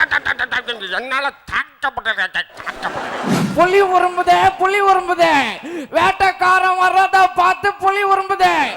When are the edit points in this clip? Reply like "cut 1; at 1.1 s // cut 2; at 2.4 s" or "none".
cut 1; at 3.4 s